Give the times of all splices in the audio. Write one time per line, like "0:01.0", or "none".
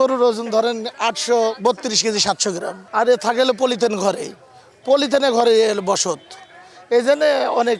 0:02.7

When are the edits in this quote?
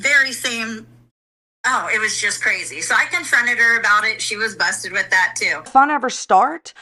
none

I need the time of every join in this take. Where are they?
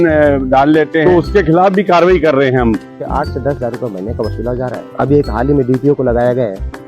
0:01.0
0:03.0
0:04.8

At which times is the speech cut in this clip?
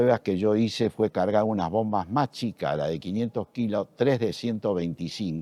none

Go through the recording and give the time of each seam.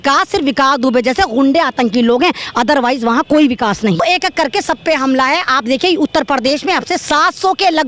0:04.0

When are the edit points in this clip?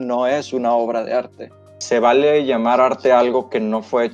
0:01.8

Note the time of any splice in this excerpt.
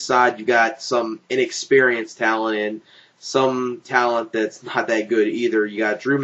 0:02.5

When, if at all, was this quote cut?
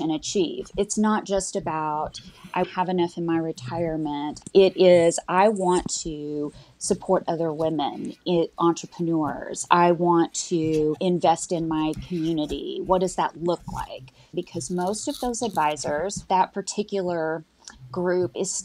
0:04.3
0:14.3

